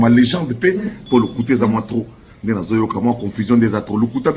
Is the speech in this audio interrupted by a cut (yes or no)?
yes